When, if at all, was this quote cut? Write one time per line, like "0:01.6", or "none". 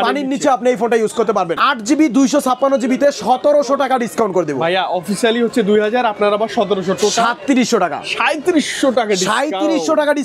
0:01.6